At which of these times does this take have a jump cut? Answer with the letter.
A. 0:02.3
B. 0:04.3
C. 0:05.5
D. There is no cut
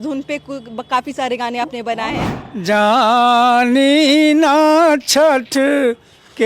A